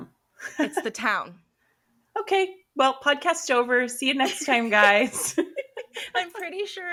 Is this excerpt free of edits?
yes; 0 cuts

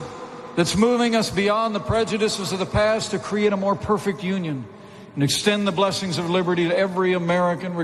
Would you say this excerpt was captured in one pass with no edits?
yes; 0 cuts

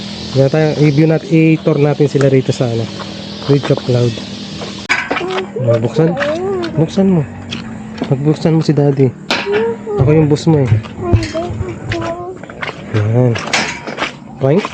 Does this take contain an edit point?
yes; 1 cut; at 4.9 s

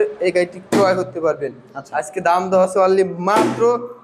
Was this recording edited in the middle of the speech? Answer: no; 0 cuts

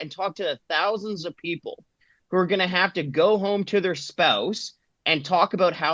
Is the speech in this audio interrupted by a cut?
no; 0 cuts

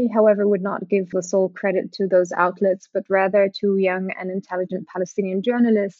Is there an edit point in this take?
yes; 1 cut; at 1.1 s

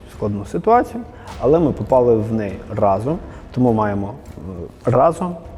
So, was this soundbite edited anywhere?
no; 0 cuts

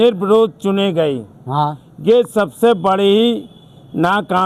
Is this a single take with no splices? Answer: yes; 0 cuts

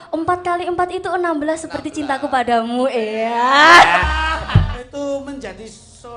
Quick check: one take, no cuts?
no; 1 cut; at 4.8 s

